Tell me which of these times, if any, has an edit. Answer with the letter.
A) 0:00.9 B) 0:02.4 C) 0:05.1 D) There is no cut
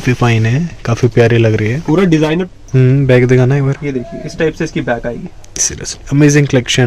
B